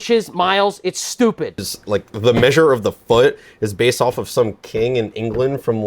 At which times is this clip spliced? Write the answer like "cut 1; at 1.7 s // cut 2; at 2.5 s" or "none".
cut 1; at 1.7 s